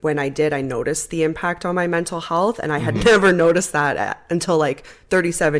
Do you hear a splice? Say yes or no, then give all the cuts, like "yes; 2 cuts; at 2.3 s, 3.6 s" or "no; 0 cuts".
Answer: no; 0 cuts